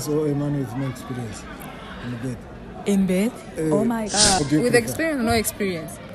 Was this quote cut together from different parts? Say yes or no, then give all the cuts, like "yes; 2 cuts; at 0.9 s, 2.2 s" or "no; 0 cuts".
yes; 1 cut; at 4.4 s